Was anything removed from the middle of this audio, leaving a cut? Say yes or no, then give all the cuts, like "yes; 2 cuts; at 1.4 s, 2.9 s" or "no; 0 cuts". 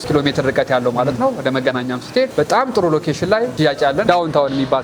yes; 2 cuts; at 2.3 s, 3.9 s